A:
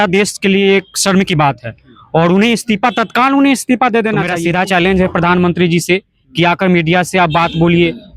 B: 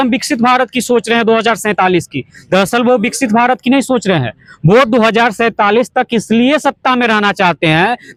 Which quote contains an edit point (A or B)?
A